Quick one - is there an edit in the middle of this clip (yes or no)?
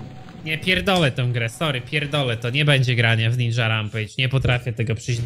no